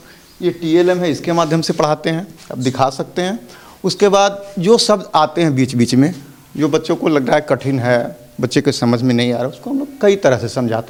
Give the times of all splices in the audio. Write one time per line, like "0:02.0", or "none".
none